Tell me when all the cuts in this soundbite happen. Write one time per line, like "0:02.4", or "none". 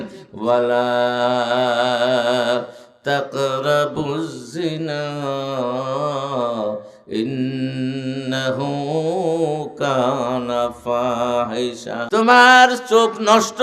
0:11.9